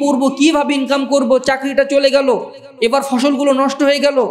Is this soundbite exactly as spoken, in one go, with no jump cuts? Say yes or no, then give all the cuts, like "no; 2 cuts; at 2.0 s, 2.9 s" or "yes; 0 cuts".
yes; 0 cuts